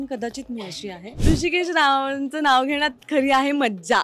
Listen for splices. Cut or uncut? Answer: cut